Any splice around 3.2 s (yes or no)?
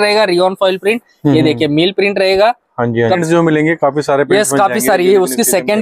yes